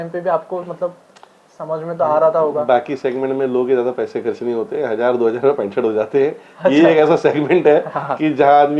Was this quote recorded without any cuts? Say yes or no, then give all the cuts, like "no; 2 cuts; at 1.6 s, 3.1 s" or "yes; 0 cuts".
yes; 0 cuts